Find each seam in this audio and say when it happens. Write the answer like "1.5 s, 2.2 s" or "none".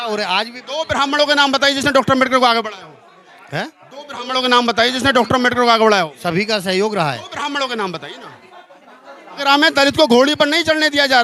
9.4 s